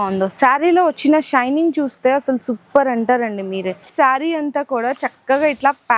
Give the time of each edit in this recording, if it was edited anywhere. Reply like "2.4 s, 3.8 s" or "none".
3.9 s